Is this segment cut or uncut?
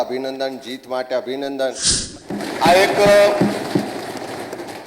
cut